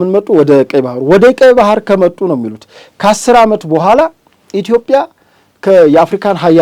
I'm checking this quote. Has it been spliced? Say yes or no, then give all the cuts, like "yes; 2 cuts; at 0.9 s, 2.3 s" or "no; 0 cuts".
no; 0 cuts